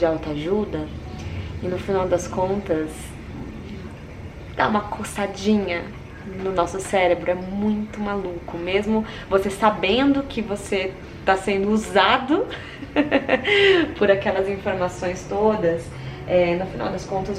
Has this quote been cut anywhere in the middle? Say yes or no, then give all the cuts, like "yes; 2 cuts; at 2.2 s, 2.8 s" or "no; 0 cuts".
no; 0 cuts